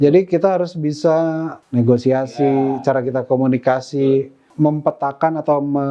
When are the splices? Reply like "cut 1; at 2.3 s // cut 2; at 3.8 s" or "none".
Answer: cut 1; at 1.5 s // cut 2; at 4.4 s